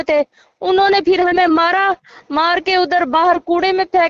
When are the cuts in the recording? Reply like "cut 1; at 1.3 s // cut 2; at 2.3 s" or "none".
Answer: none